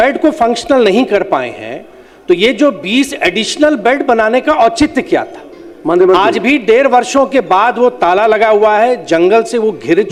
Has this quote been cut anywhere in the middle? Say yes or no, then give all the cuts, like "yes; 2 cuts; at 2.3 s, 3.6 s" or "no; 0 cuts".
no; 0 cuts